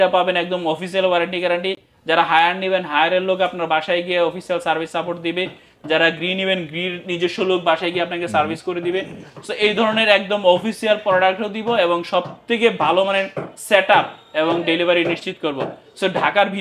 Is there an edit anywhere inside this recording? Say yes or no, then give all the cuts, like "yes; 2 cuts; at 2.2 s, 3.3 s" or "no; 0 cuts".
no; 0 cuts